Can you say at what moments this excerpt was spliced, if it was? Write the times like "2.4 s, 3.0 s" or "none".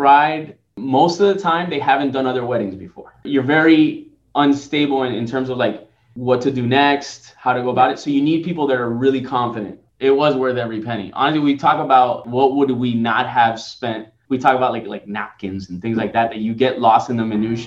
3.3 s, 9.8 s, 12.2 s, 14.1 s